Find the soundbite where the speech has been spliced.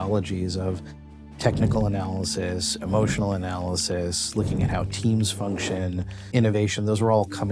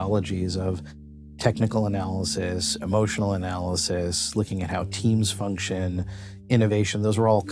first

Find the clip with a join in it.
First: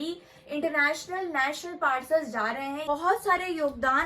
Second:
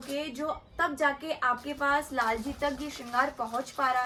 first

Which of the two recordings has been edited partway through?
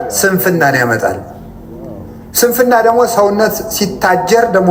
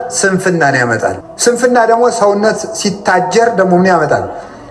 second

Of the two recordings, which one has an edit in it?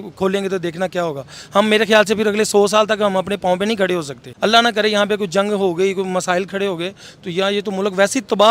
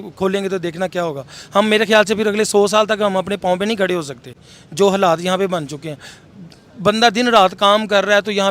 first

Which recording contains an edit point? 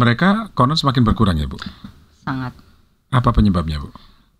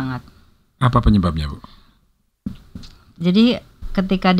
second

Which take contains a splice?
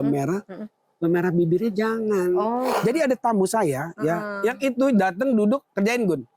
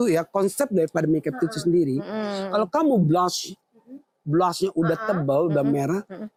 first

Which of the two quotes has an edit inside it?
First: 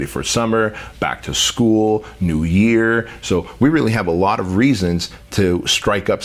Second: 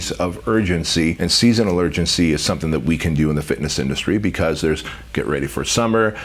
second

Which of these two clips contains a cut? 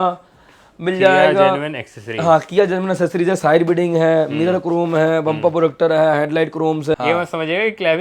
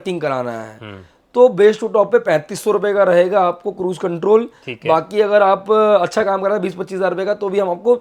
first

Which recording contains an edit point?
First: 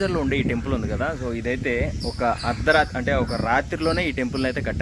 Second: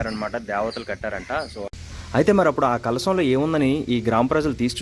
second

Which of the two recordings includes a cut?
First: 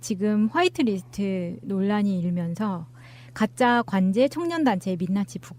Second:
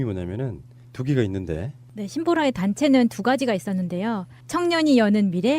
second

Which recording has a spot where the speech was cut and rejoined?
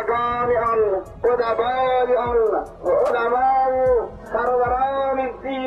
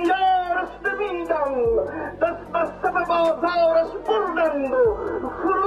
first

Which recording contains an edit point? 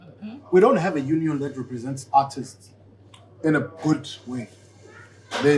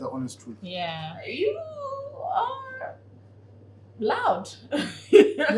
second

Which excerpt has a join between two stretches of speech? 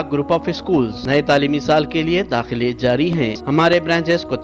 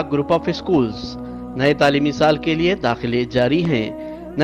first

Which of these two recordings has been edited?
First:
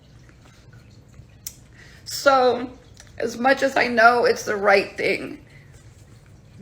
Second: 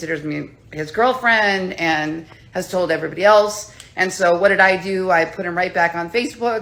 first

